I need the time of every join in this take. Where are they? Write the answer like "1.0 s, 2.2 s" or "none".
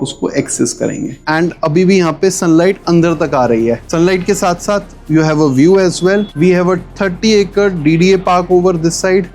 1.2 s, 3.8 s